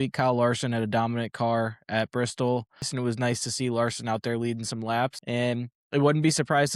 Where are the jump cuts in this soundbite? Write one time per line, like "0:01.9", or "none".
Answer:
0:02.9
0:05.2